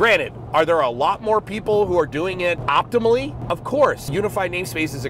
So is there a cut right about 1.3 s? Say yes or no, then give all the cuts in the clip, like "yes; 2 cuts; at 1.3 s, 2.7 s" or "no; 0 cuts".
no; 3 cuts; at 2.6 s, 3.4 s, 4.1 s